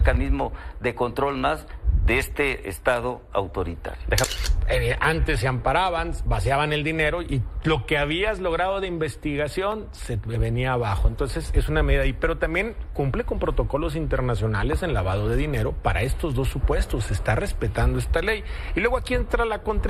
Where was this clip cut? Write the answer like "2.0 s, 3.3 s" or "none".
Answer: 4.3 s

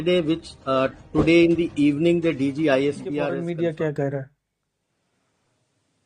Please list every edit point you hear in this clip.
3.3 s

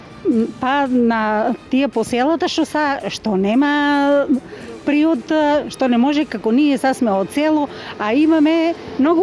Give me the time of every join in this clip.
none

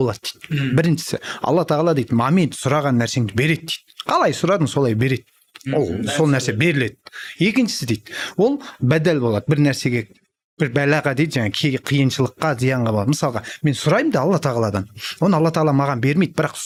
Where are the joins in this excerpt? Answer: none

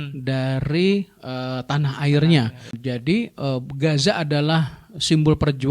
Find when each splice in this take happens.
2.7 s

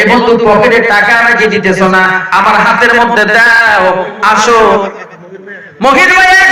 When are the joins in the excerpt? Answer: none

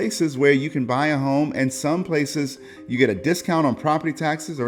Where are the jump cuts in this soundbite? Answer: none

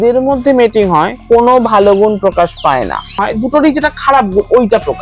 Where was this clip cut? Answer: 3.2 s

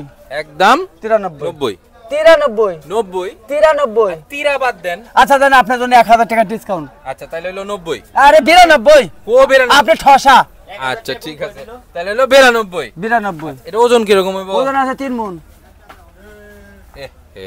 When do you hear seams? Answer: none

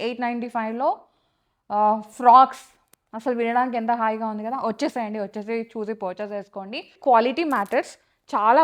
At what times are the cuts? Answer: 6.9 s

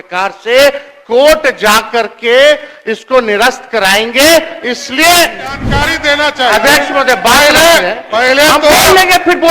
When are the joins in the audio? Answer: 5.6 s

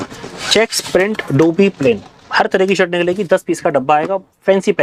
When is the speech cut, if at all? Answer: none

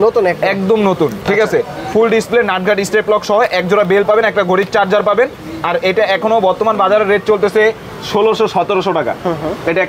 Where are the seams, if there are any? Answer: none

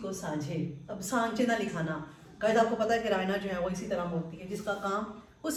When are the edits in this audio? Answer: none

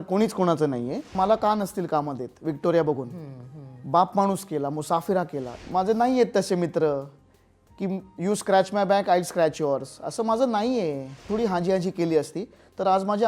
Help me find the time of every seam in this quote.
1.1 s, 5.5 s, 11.2 s

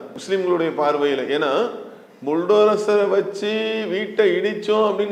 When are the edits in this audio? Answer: none

